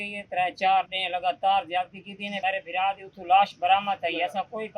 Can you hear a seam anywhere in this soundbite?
yes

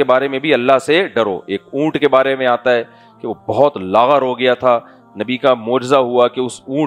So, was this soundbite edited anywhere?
no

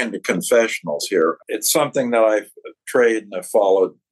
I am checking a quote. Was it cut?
yes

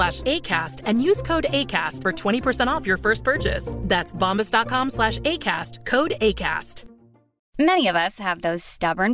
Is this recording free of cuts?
yes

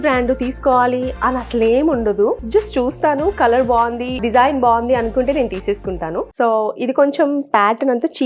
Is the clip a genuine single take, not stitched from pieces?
no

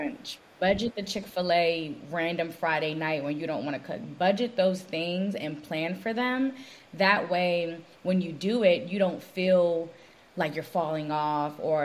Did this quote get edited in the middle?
no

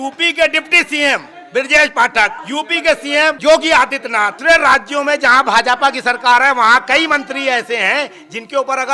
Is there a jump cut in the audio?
yes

